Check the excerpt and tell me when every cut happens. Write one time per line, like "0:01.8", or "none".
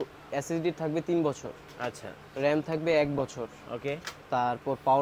none

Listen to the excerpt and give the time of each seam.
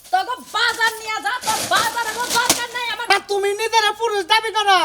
0:03.1

